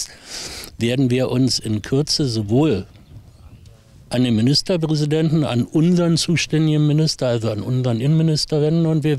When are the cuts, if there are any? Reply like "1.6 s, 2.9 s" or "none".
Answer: none